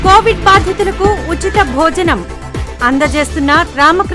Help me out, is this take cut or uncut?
uncut